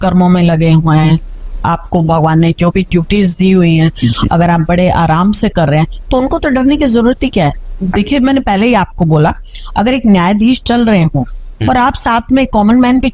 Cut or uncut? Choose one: uncut